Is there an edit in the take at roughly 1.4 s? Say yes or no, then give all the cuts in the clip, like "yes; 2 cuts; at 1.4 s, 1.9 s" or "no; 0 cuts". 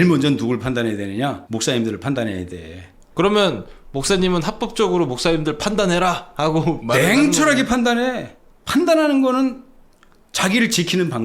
yes; 1 cut; at 1.4 s